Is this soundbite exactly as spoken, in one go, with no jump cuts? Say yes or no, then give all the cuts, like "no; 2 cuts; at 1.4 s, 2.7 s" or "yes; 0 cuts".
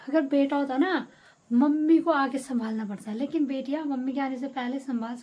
yes; 0 cuts